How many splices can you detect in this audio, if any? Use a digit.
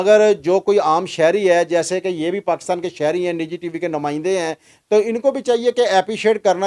0